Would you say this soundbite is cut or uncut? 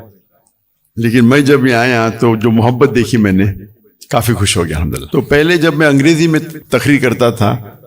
cut